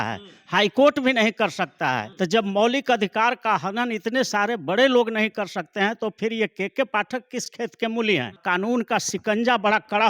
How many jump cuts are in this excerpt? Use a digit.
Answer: 3